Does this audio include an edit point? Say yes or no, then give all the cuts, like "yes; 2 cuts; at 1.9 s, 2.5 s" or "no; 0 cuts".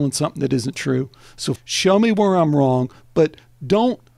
yes; 1 cut; at 1.6 s